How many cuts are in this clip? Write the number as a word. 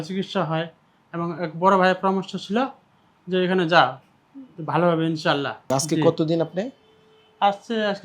one